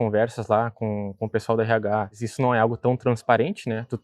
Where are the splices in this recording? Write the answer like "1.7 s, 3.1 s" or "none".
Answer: 2.2 s